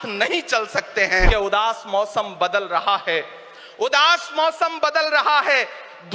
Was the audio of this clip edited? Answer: yes; 1 cut; at 1.3 s

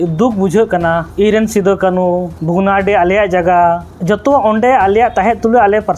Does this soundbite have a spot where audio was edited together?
yes; 3 cuts; at 1.1 s, 2.3 s, 3.9 s

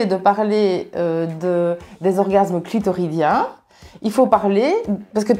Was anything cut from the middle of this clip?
no; 0 cuts

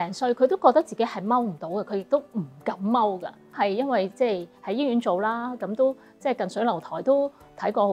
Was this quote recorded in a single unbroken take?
yes; 0 cuts

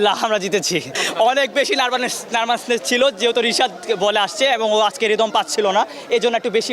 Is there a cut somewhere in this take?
yes; 1 cut; at 1.0 s

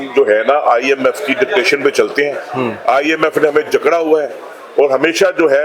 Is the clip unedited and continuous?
yes; 0 cuts

